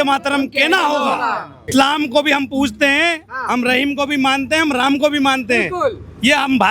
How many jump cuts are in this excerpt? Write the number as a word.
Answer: one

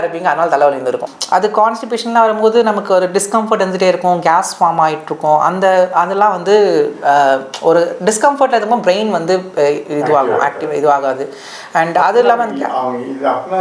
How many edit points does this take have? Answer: one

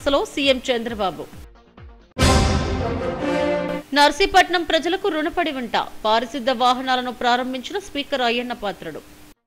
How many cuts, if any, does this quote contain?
zero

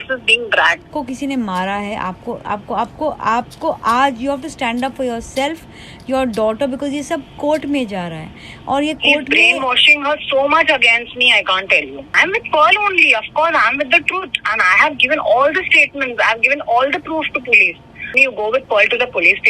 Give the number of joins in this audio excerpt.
three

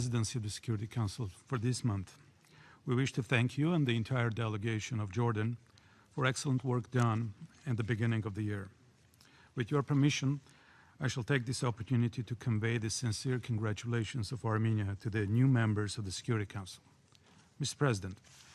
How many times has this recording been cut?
one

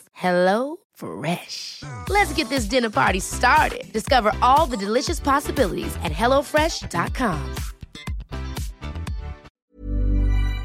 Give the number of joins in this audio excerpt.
one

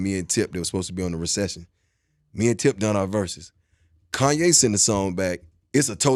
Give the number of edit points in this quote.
zero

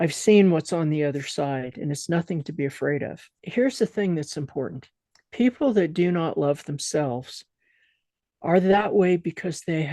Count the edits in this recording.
one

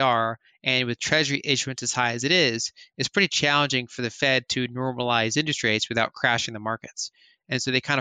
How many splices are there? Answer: zero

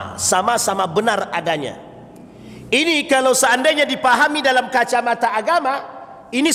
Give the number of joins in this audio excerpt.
zero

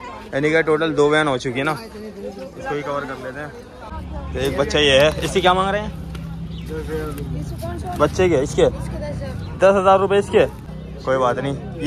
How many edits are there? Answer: two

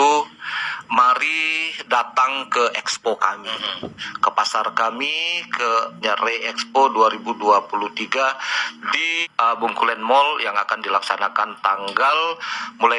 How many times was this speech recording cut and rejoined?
two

